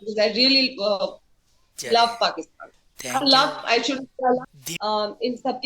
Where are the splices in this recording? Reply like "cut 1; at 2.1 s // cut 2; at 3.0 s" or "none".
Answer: cut 1; at 4.5 s